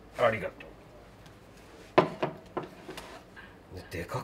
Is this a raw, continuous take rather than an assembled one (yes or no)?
yes